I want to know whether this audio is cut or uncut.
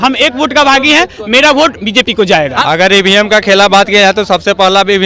cut